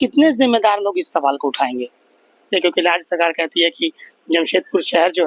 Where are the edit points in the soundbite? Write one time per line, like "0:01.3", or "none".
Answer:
0:02.4